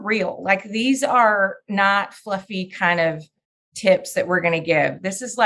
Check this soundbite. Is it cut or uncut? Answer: uncut